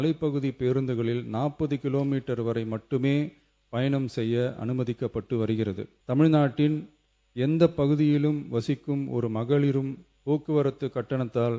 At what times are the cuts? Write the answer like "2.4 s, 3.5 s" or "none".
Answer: 5.9 s